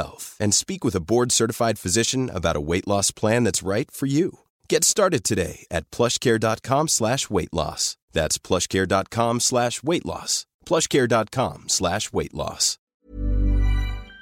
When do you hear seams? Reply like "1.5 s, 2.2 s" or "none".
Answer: 13.0 s

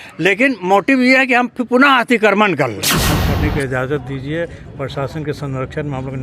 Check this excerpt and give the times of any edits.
3.0 s

